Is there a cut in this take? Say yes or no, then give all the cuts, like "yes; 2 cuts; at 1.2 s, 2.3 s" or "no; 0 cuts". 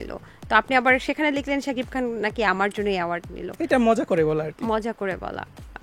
no; 0 cuts